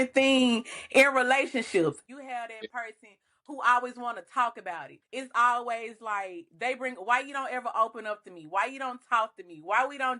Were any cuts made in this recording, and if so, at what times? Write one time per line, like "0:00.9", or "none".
0:02.0
0:04.9